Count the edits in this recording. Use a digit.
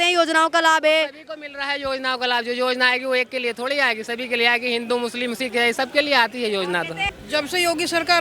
1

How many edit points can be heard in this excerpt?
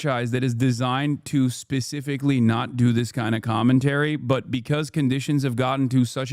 0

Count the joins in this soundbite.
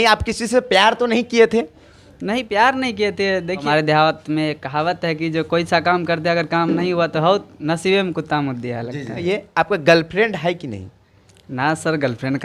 2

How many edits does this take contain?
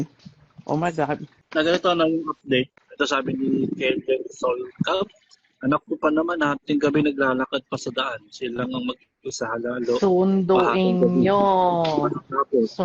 2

